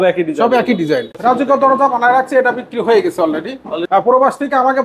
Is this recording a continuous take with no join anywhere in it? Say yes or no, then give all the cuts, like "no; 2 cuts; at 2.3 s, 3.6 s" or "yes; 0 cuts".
no; 2 cuts; at 1.1 s, 3.7 s